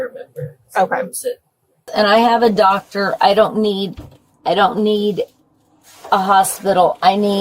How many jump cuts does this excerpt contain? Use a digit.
1